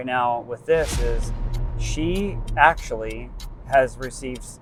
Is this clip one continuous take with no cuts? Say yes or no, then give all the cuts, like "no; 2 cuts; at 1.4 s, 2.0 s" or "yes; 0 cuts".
yes; 0 cuts